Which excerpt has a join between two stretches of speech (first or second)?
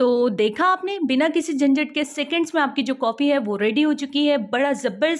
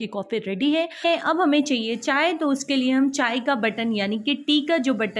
second